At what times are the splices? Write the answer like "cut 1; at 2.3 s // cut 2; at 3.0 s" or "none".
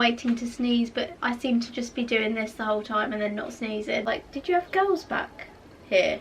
cut 1; at 4.0 s